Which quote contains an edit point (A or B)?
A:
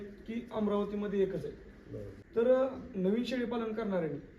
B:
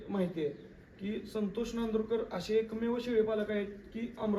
A